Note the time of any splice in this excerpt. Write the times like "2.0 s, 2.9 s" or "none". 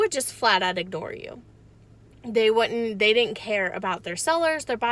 none

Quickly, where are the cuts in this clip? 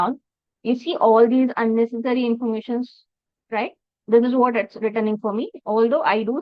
none

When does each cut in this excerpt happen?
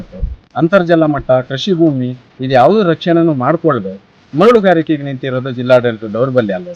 none

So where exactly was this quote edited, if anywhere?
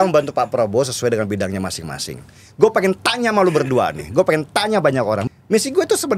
5.2 s

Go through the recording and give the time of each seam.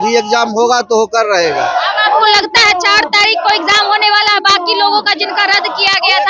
none

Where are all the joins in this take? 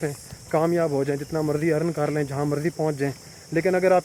none

